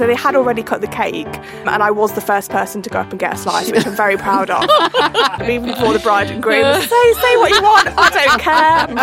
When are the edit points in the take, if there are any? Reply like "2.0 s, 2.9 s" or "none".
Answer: 1.7 s, 5.4 s